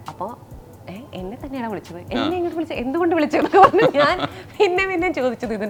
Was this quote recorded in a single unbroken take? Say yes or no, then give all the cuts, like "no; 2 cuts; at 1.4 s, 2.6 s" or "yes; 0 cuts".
yes; 0 cuts